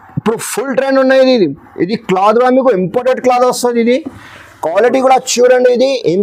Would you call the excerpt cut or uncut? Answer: uncut